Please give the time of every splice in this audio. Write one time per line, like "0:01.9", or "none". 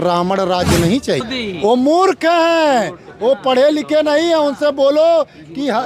0:01.3